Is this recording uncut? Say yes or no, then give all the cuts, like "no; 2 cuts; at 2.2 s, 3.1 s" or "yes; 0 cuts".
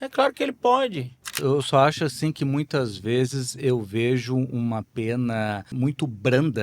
no; 2 cuts; at 1.4 s, 5.7 s